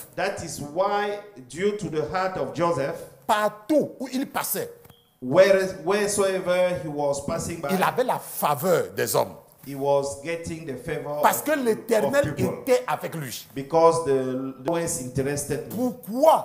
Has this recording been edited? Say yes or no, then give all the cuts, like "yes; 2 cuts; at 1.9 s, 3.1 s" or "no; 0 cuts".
yes; 1 cut; at 14.7 s